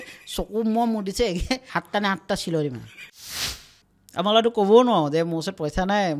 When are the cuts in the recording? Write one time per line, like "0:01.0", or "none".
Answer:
0:01.7
0:03.4